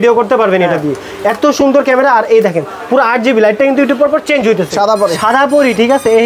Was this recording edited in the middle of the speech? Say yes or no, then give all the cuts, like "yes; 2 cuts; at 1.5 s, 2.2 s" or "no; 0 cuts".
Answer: yes; 1 cut; at 4.7 s